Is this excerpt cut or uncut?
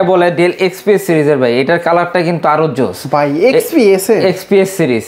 uncut